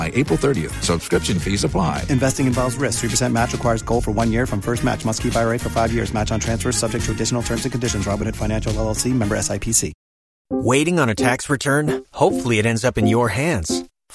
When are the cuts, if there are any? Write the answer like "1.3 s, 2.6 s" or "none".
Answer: 10.5 s